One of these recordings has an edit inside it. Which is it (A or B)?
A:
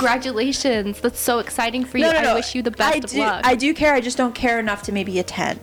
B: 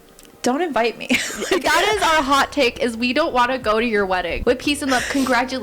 B